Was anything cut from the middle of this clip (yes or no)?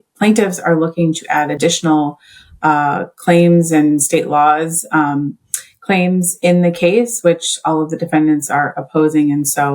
no